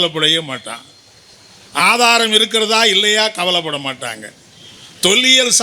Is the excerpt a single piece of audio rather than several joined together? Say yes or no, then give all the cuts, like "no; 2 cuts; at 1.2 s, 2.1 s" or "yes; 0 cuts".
yes; 0 cuts